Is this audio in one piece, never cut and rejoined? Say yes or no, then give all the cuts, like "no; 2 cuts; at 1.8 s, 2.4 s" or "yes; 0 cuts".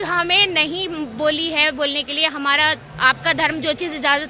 yes; 0 cuts